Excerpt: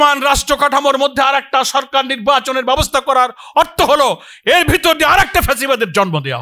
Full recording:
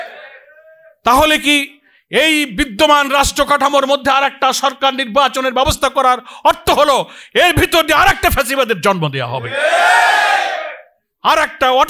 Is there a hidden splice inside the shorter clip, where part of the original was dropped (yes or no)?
no